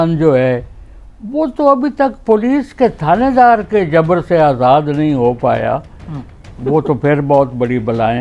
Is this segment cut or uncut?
uncut